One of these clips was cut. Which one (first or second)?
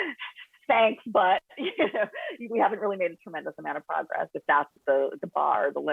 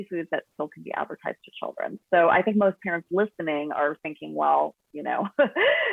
first